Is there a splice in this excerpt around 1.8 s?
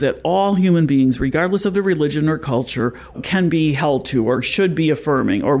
no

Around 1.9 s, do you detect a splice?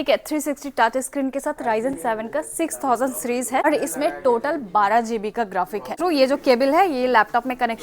no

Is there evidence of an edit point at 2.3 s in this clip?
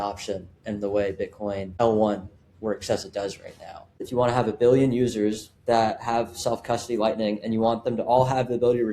no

